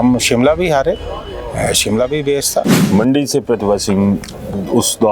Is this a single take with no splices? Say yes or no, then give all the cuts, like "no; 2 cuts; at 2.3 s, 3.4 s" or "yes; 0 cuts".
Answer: no; 1 cut; at 2.8 s